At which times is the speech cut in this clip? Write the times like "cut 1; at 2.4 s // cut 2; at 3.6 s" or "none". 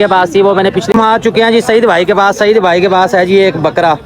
cut 1; at 0.9 s